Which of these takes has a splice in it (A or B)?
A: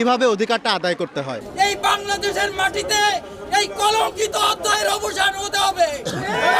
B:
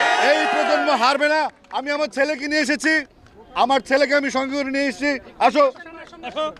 A